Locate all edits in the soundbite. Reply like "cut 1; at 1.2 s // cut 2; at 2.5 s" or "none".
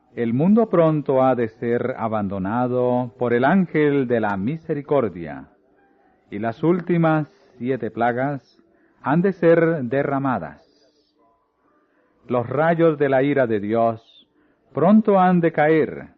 cut 1; at 6.6 s